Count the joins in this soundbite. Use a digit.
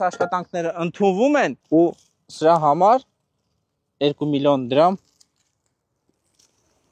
1